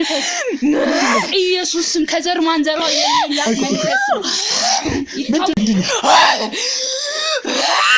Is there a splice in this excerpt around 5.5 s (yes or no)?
yes